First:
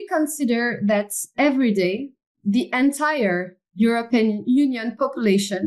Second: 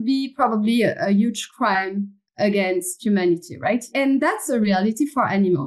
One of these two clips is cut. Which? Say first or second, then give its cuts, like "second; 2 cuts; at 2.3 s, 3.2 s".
second; 1 cut; at 3.9 s